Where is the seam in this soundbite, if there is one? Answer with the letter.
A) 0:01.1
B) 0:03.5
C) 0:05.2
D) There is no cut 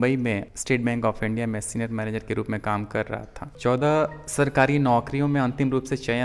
B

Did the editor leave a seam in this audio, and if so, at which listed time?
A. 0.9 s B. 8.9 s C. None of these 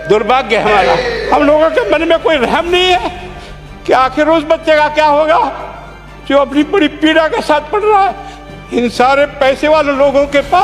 A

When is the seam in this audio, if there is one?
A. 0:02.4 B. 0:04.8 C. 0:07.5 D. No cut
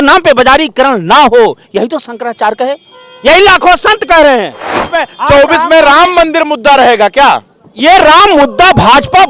B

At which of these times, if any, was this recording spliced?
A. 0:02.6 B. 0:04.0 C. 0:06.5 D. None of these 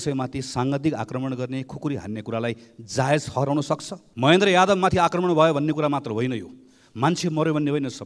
B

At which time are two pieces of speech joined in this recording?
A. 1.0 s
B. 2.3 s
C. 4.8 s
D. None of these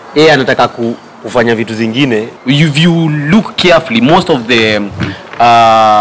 B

